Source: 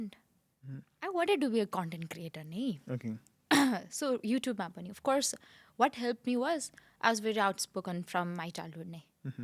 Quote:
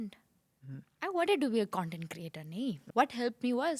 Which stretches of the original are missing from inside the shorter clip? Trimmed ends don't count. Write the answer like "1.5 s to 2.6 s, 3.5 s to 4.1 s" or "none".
2.8 s to 5.7 s